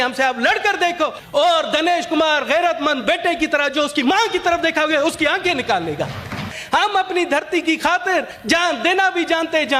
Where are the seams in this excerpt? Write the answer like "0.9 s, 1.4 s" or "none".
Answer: 1.2 s, 6.5 s, 8.3 s